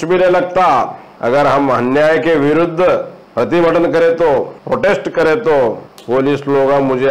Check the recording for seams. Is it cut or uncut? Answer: cut